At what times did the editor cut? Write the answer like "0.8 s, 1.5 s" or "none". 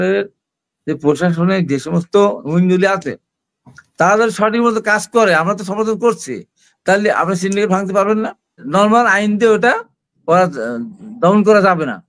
8.7 s